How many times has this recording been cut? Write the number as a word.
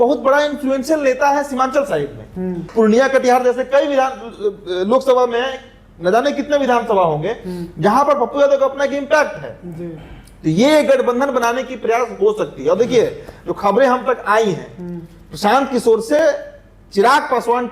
zero